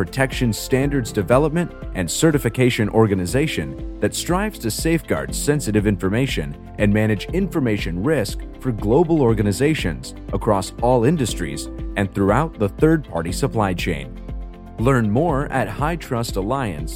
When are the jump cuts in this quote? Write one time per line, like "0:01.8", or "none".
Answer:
none